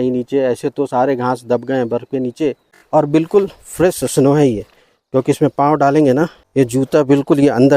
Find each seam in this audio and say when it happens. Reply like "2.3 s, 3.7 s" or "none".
2.7 s, 6.4 s